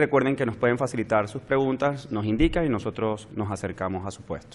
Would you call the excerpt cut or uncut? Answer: cut